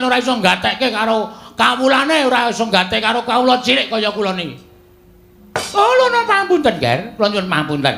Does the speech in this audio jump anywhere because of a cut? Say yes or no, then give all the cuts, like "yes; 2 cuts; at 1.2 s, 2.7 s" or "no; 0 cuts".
no; 0 cuts